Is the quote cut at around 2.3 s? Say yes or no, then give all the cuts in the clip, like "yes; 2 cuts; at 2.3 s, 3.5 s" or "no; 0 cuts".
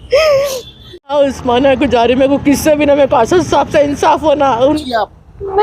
no; 2 cuts; at 1.1 s, 4.8 s